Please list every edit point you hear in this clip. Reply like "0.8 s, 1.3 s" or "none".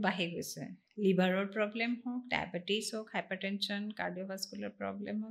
none